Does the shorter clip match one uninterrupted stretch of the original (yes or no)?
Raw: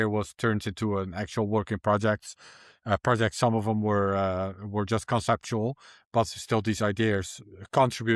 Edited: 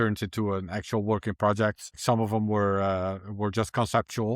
no